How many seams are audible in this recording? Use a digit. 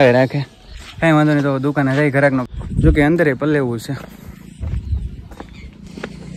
1